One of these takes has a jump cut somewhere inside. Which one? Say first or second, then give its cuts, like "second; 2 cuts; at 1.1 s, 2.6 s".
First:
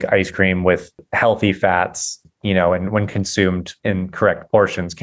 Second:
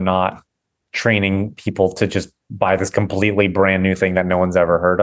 first; 3 cuts; at 1.1 s, 2.2 s, 3.7 s